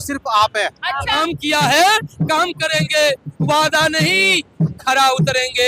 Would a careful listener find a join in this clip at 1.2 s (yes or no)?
yes